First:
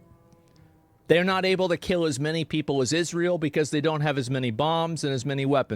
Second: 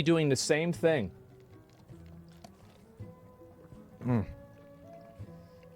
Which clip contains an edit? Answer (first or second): first